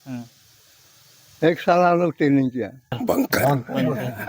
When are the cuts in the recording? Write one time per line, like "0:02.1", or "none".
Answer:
0:03.0